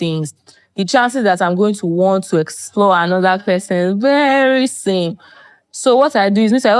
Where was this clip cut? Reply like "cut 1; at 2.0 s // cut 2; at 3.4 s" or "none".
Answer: none